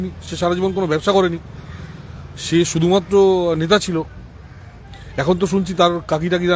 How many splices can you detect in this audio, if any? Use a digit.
0